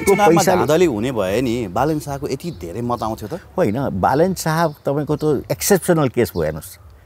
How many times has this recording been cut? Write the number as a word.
zero